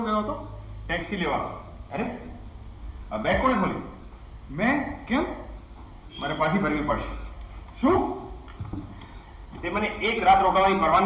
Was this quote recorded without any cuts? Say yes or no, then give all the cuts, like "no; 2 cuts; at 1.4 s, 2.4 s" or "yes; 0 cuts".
yes; 0 cuts